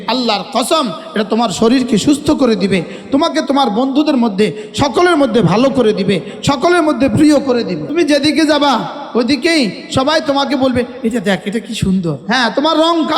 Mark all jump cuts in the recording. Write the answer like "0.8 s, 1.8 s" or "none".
7.9 s, 12.2 s